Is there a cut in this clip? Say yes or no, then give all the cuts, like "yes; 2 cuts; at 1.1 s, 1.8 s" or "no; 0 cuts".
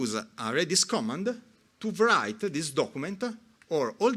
no; 0 cuts